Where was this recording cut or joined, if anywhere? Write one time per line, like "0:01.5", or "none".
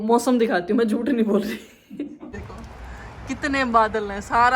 0:02.3